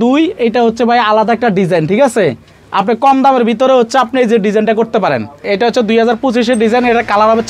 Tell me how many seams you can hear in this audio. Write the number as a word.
one